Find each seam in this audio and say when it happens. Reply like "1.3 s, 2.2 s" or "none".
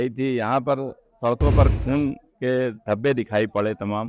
none